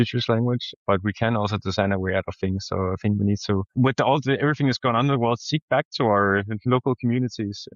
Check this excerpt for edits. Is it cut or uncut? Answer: uncut